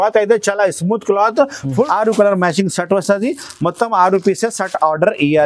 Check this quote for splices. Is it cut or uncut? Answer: cut